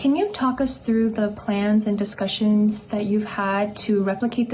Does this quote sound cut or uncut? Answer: uncut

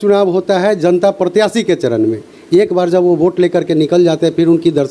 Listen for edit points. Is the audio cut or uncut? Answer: uncut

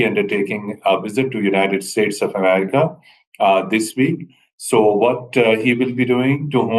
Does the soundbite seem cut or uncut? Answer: uncut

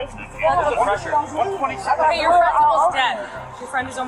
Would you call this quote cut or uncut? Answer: uncut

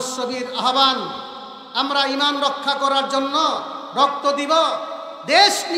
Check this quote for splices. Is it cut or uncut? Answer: uncut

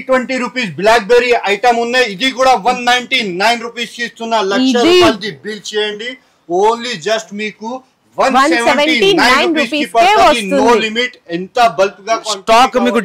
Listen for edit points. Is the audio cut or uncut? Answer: uncut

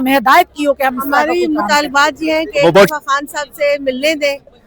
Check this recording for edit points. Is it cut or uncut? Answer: cut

